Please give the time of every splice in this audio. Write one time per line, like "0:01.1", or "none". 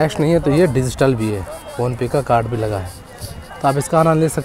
none